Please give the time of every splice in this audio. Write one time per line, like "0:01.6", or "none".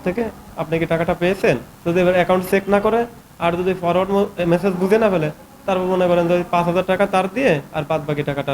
0:01.7